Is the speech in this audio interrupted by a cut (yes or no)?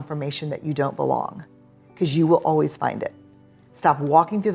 no